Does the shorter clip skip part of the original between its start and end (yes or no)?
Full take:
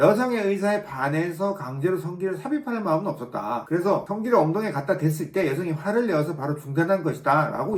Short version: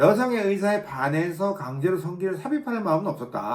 no